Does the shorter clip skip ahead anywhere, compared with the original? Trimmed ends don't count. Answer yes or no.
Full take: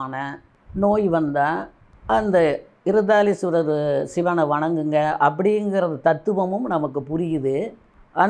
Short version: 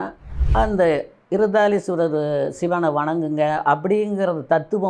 no